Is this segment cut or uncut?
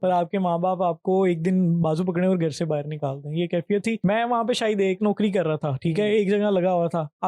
cut